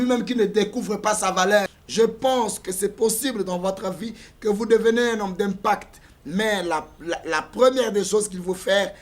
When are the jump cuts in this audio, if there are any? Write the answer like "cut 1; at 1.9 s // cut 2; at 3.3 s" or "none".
cut 1; at 1.8 s